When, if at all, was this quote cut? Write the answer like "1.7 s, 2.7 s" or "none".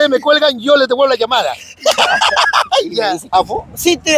3.3 s